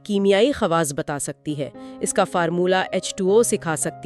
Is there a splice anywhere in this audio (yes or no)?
no